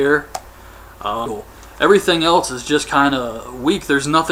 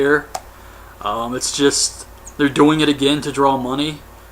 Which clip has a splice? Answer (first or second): second